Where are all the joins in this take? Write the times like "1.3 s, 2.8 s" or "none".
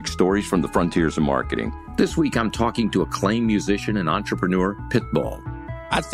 1.5 s